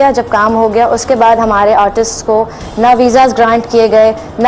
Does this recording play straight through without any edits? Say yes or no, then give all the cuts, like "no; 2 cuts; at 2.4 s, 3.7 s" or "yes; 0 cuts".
yes; 0 cuts